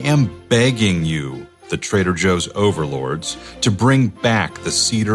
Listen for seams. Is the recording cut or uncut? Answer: uncut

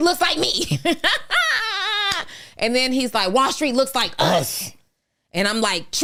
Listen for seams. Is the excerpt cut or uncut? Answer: uncut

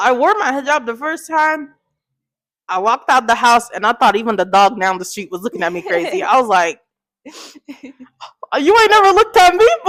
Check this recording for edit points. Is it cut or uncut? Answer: uncut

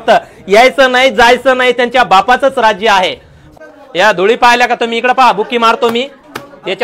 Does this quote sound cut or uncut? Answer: cut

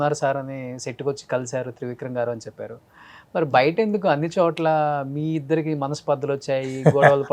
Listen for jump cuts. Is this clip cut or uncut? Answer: uncut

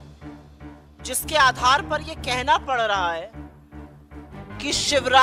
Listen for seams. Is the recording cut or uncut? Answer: uncut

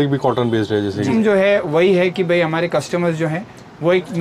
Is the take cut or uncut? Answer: cut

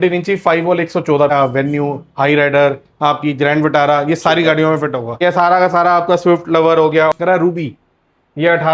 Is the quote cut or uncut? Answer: cut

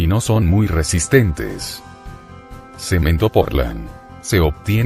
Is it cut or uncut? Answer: cut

